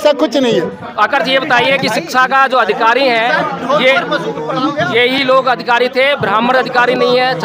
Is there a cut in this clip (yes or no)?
no